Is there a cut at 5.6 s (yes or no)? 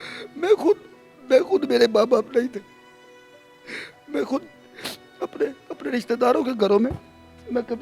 no